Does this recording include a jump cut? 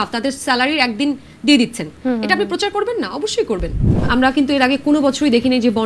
yes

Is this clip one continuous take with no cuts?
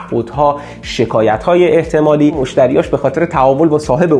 no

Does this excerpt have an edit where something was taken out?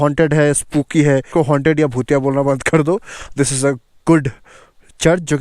yes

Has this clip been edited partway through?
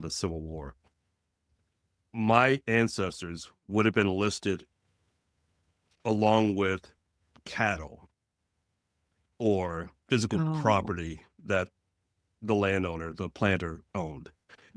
no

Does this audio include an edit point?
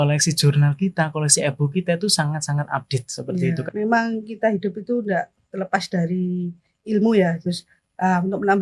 yes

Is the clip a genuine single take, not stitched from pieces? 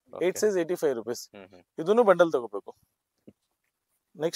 yes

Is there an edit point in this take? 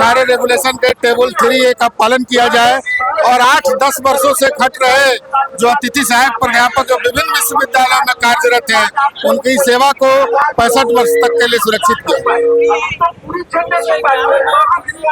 no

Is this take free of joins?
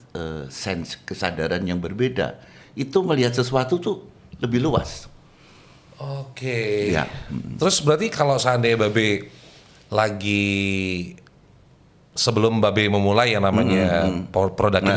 yes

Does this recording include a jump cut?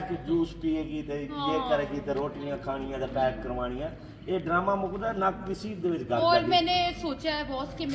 no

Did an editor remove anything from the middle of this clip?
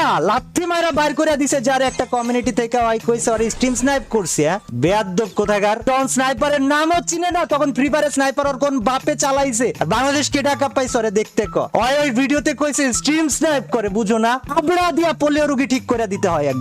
no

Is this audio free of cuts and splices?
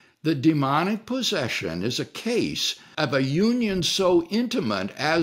no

